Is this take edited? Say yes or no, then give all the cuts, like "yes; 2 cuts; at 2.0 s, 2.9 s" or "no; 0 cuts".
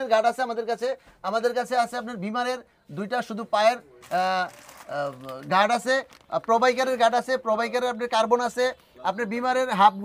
no; 0 cuts